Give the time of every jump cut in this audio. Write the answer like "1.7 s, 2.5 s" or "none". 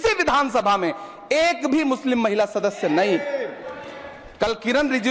none